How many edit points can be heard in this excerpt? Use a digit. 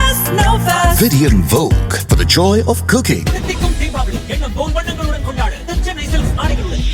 0